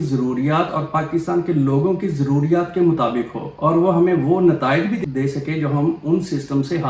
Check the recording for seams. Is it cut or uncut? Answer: cut